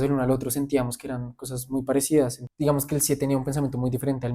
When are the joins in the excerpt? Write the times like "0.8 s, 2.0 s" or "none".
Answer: 2.4 s

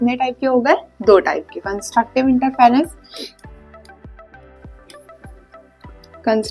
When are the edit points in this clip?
none

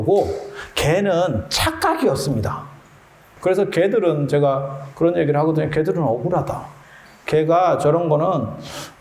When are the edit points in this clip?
3.2 s

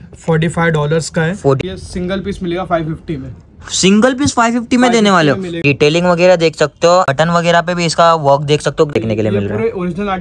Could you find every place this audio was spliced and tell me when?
1.6 s, 5.6 s, 7.1 s, 8.9 s

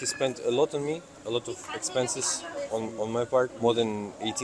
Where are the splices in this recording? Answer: 1.1 s, 3.5 s

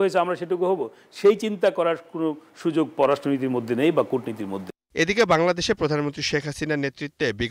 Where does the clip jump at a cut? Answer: none

